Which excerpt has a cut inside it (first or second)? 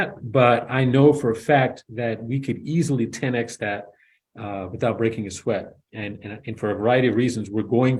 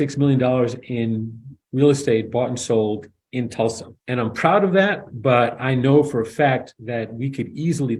second